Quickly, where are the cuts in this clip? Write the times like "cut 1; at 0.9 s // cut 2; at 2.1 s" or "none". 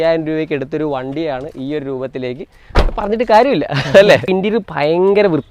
cut 1; at 4.3 s